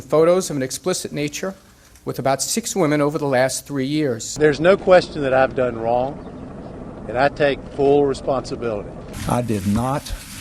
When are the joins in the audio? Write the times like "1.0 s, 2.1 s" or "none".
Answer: none